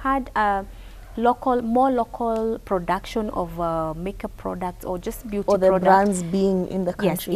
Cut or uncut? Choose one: uncut